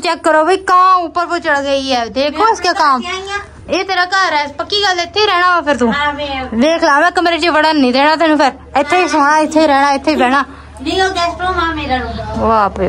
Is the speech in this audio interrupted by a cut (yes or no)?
no